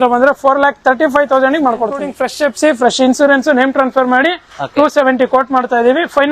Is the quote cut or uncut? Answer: cut